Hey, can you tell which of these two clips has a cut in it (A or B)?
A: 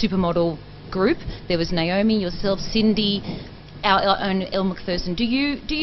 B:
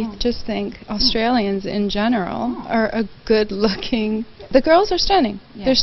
B